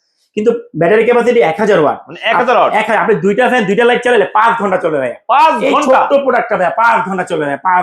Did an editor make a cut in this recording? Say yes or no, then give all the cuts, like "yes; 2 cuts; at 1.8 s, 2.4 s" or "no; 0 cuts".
no; 0 cuts